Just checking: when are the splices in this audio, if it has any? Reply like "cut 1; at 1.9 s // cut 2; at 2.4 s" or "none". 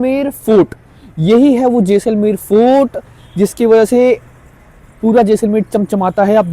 none